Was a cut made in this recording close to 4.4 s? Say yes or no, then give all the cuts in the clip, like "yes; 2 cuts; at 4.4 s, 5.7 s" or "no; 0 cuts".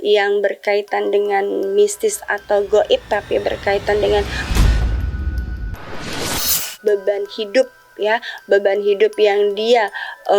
yes; 2 cuts; at 4.4 s, 6.7 s